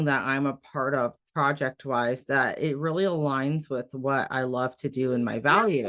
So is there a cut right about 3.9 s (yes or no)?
no